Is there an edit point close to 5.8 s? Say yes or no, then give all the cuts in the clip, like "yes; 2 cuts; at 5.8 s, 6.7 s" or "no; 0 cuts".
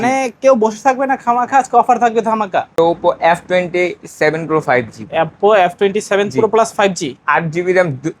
no; 1 cut; at 2.7 s